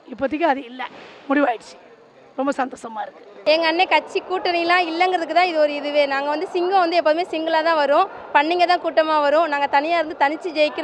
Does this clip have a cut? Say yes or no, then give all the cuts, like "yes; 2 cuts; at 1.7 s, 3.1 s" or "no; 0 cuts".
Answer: yes; 1 cut; at 3.4 s